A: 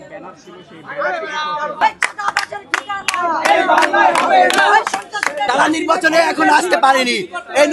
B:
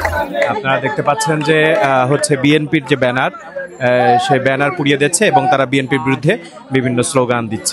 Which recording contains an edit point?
A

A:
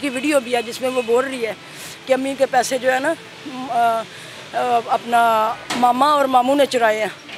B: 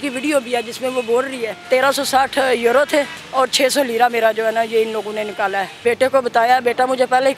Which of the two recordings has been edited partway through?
B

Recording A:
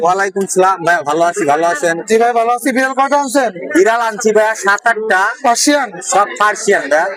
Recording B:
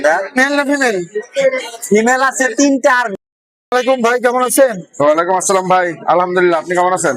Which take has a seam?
B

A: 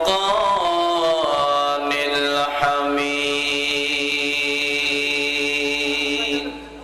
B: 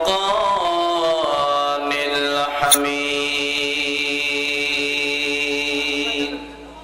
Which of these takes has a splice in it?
B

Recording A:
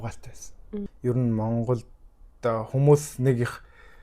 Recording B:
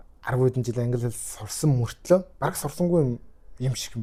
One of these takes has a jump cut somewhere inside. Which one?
A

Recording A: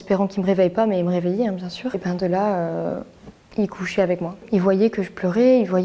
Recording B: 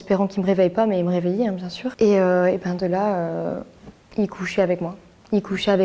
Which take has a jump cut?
A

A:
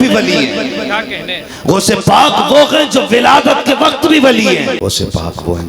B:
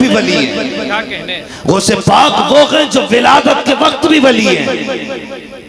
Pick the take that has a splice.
A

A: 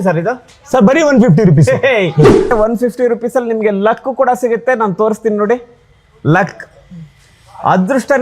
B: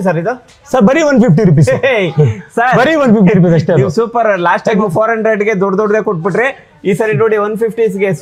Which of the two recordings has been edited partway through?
A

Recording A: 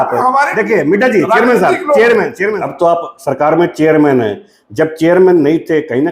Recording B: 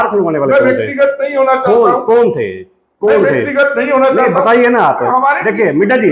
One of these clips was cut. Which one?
A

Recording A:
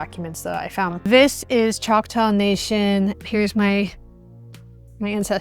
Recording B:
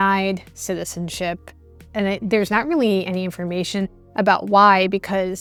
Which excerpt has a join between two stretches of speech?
A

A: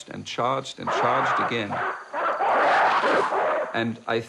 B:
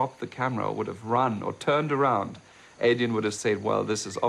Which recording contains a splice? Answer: B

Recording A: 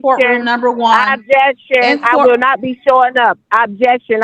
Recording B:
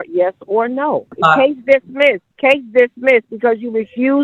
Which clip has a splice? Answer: B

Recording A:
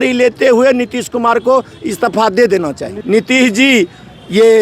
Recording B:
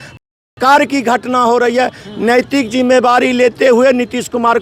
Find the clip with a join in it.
A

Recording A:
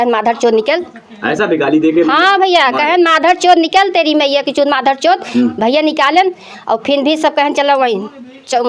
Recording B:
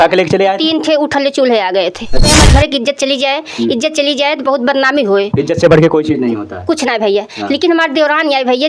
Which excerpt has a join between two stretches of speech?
B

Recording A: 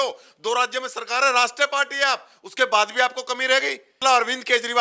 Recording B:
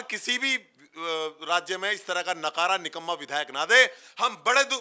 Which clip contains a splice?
A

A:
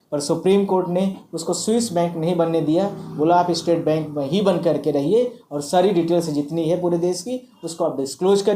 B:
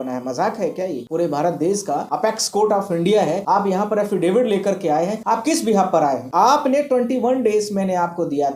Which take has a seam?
B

